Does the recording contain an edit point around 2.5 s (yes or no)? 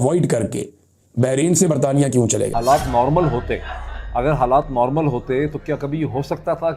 yes